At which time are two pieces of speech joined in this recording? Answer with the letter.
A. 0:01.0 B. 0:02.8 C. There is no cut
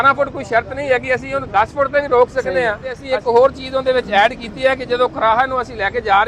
B